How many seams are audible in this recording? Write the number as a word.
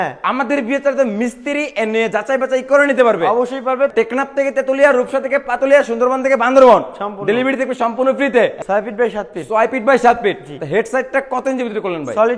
two